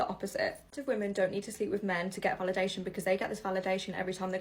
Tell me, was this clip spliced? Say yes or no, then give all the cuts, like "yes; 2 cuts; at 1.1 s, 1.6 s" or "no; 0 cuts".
no; 0 cuts